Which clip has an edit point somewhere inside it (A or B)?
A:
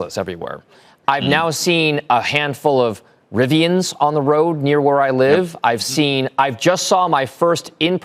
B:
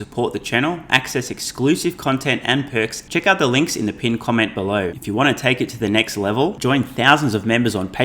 B